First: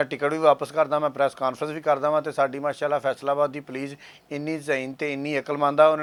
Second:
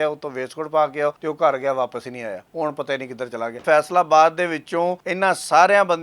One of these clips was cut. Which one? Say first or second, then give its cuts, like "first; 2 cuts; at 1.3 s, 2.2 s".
second; 4 cuts; at 1.2 s, 2.4 s, 3.6 s, 5.0 s